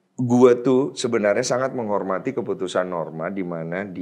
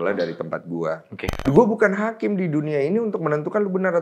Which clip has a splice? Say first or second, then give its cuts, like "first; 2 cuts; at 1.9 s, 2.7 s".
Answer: second; 1 cut; at 1.4 s